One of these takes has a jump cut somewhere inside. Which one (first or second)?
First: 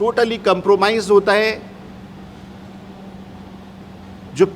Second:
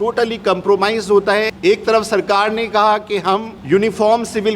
second